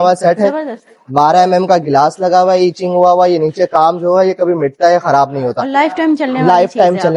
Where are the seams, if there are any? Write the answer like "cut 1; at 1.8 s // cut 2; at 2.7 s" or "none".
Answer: none